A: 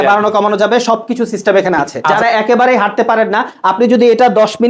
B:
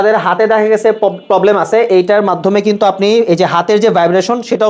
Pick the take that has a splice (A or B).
A